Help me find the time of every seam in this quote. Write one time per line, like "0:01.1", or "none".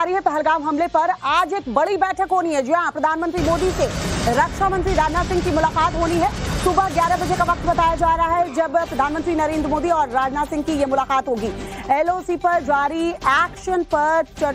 none

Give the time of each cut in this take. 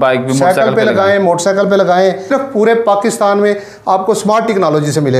0:02.3

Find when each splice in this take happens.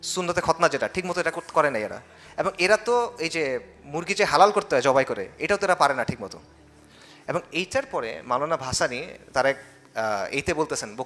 none

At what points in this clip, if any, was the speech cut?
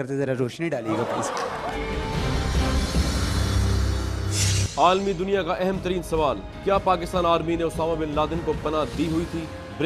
0:01.6
0:04.2

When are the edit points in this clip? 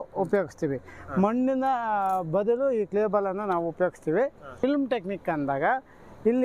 0:04.4

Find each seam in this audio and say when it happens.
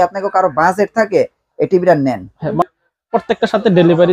0:02.6

